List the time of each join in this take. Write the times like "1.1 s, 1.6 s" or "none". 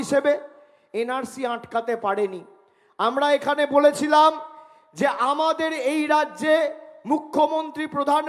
none